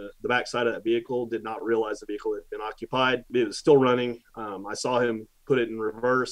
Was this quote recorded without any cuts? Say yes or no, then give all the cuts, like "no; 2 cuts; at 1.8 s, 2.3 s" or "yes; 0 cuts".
no; 1 cut; at 3.3 s